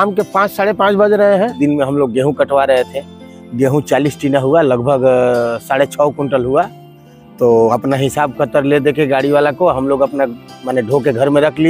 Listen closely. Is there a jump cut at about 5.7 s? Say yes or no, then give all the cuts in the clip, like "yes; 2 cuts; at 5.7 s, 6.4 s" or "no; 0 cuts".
no; 1 cut; at 1.6 s